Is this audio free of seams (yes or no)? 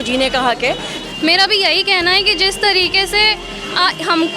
no